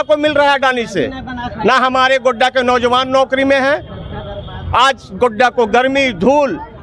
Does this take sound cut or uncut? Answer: uncut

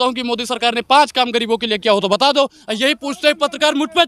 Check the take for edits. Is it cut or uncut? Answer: uncut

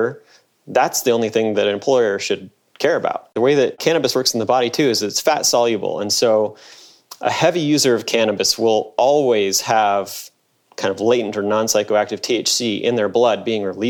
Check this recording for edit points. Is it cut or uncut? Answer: uncut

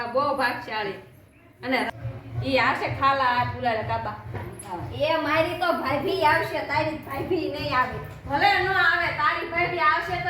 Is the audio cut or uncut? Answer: cut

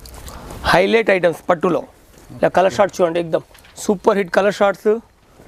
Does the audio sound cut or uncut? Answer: uncut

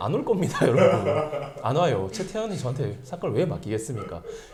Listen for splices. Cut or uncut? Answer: uncut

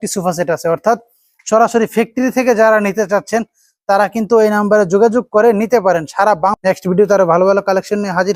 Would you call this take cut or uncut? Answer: uncut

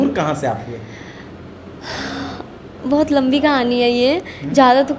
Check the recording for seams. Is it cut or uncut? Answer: uncut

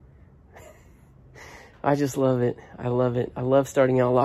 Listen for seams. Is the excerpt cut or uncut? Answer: uncut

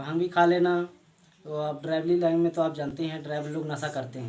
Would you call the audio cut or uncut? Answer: uncut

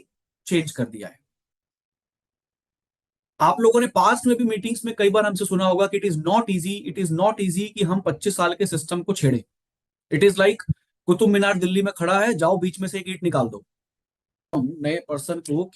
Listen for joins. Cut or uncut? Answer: cut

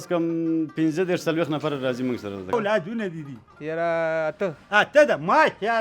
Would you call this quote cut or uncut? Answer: cut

